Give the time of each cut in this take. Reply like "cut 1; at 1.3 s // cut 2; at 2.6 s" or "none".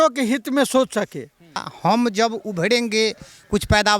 cut 1; at 1.7 s